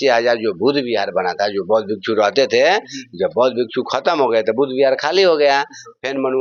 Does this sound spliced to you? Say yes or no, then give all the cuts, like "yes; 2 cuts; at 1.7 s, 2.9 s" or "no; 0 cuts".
no; 0 cuts